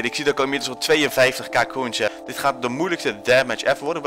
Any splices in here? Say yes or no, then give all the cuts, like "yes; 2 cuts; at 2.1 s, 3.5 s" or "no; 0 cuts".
yes; 1 cut; at 2.2 s